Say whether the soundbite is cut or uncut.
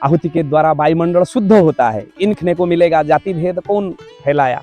cut